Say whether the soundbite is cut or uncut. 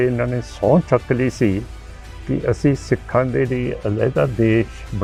uncut